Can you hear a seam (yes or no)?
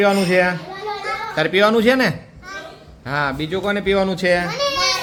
no